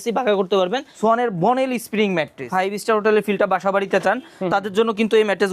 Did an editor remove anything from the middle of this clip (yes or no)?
yes